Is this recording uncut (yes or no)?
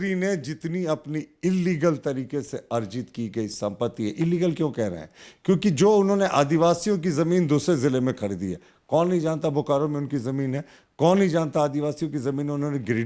yes